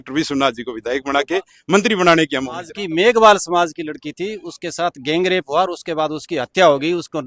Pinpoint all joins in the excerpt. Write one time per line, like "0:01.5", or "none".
0:02.8